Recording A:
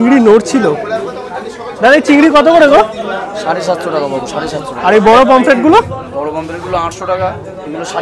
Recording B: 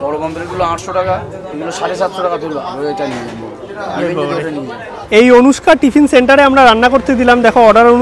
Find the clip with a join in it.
B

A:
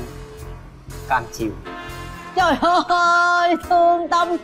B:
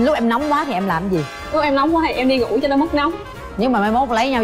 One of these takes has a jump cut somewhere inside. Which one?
B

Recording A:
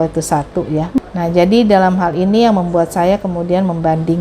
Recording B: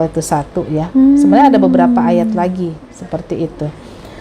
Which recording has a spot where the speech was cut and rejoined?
A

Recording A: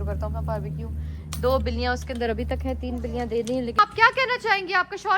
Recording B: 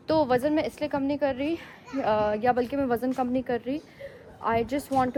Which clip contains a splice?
A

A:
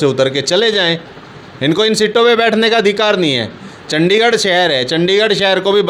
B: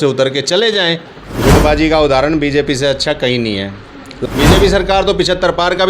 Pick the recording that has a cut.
B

